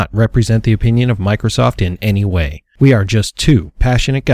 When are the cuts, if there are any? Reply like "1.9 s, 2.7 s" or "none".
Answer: 2.6 s